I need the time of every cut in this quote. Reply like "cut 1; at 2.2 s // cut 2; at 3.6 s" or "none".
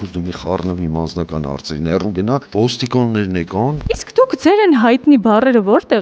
cut 1; at 2.5 s // cut 2; at 3.8 s